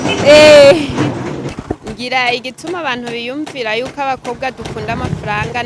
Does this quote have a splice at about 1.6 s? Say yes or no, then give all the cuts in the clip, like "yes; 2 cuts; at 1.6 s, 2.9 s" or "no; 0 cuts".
yes; 1 cut; at 1.6 s